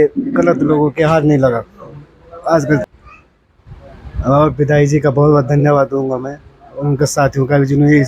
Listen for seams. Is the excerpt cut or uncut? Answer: cut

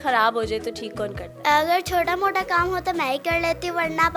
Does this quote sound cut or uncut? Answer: cut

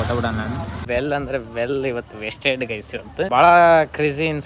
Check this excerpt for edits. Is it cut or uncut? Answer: cut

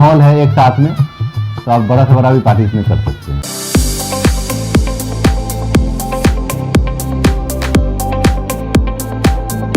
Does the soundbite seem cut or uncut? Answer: cut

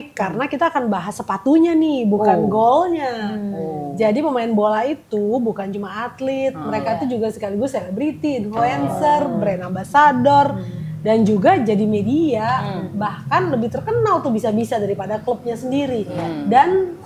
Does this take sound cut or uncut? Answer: uncut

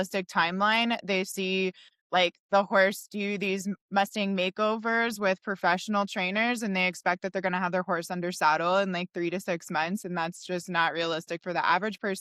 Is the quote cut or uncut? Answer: uncut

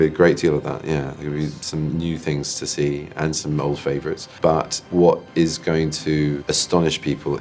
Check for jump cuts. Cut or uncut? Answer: cut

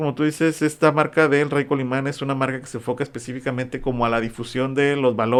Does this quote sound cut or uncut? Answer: uncut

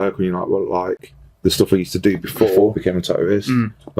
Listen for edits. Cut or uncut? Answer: cut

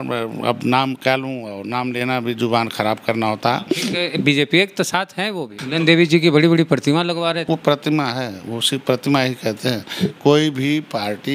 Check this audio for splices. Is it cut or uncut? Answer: cut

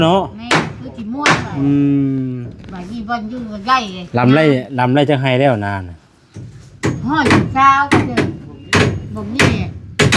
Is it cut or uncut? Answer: uncut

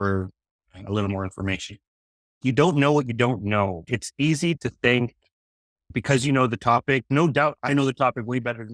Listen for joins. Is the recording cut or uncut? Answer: cut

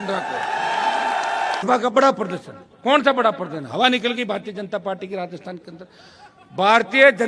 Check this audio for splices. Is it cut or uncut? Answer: cut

